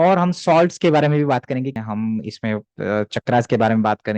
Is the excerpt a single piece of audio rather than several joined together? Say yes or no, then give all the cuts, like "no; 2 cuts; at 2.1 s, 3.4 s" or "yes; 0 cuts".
no; 1 cut; at 1.8 s